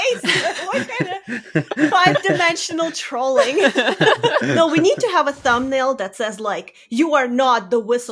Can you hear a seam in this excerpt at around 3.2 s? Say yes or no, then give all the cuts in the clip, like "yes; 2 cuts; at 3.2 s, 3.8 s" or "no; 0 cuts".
no; 1 cut; at 4.5 s